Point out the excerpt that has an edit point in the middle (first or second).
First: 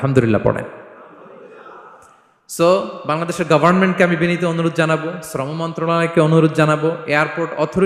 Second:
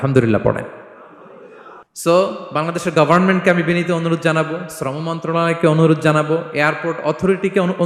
second